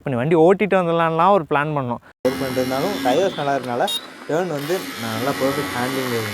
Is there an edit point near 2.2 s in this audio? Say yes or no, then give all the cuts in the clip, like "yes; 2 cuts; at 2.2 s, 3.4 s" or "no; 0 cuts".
yes; 1 cut; at 2.2 s